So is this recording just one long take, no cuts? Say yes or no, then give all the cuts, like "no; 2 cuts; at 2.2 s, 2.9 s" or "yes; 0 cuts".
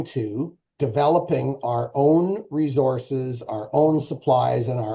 yes; 0 cuts